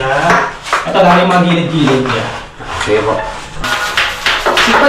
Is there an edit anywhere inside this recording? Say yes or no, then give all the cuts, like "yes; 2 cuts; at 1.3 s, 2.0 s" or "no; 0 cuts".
yes; 1 cut; at 3.6 s